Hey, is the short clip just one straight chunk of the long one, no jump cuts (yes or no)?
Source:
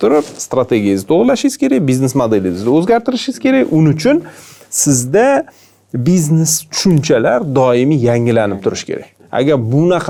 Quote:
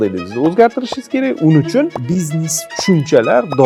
no